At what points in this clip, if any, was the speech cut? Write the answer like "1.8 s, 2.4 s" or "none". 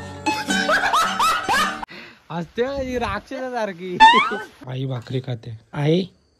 4.7 s

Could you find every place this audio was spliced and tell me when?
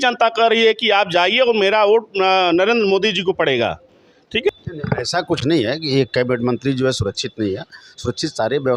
4.5 s

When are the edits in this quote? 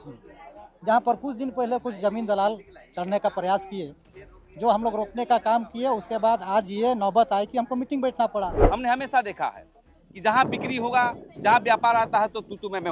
8.6 s

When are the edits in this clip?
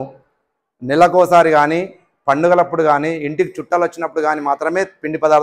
none

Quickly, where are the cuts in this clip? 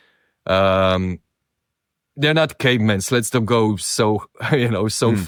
none

